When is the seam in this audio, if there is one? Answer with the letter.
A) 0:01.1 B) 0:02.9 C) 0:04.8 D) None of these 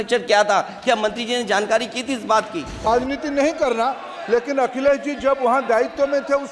B